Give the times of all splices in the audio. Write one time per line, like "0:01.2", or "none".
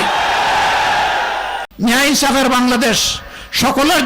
0:01.7